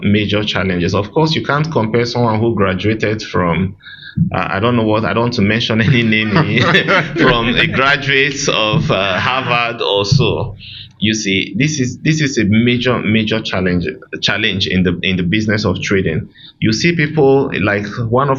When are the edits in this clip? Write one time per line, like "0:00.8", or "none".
none